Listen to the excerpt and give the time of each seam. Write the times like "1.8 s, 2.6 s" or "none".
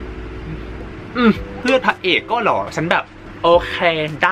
1.6 s, 3.2 s